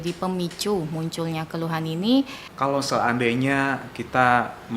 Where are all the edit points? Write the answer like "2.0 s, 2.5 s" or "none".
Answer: 2.4 s